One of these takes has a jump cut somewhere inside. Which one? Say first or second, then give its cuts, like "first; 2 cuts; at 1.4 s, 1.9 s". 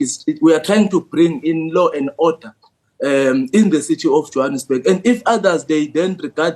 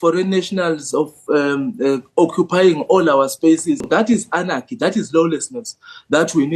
second; 1 cut; at 3.9 s